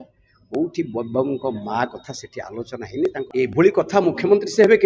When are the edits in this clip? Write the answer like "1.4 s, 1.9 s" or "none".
3.3 s